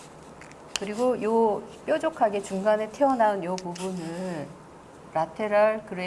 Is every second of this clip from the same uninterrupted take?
no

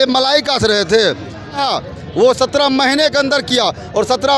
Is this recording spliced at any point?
yes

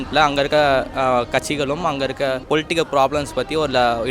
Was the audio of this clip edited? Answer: yes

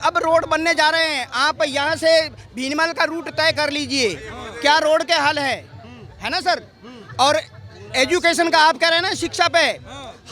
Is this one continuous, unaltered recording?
yes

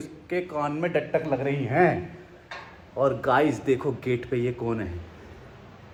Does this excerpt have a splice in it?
no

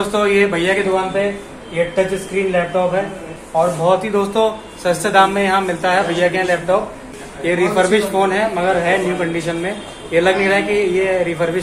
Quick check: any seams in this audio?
yes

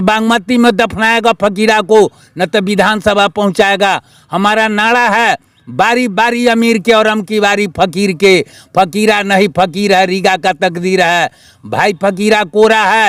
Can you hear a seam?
no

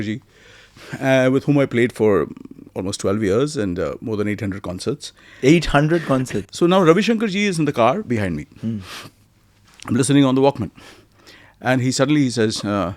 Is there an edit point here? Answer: yes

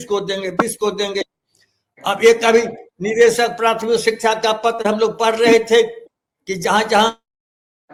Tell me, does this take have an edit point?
no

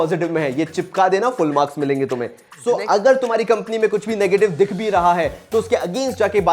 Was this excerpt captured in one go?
no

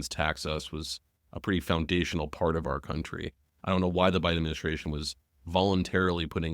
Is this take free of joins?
yes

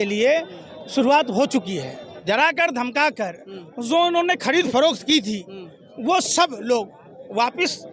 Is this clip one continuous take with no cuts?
no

